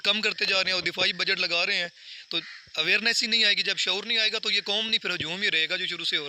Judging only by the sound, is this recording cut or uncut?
uncut